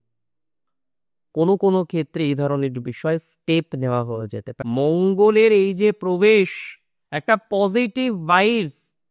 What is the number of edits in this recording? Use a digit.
1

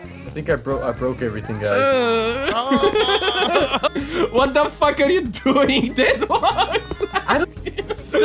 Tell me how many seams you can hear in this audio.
2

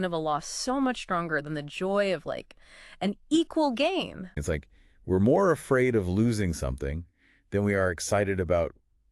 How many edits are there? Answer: 1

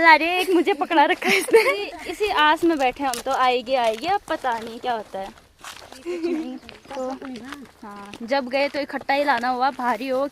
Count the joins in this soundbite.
2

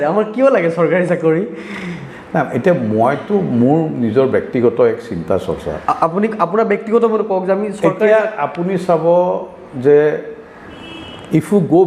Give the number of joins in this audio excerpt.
0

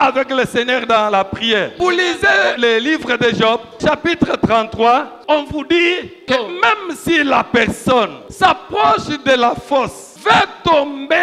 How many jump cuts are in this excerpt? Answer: 7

